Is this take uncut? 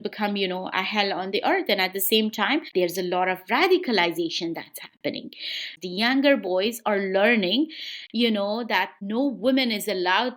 no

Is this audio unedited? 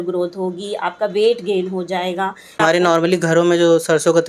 no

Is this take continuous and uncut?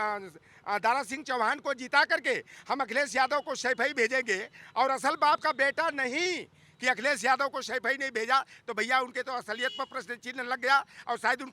yes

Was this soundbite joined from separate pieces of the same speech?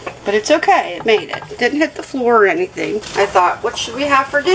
yes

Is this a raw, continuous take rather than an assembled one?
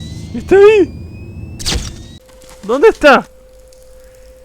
no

